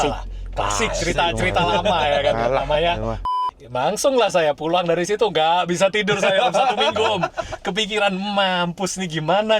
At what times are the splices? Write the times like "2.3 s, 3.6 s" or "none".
3.3 s